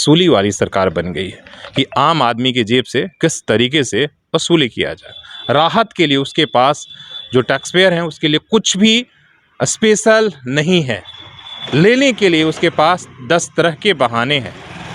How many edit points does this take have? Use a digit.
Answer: 0